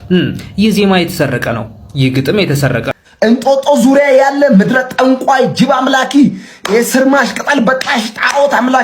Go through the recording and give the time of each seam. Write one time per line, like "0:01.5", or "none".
0:03.0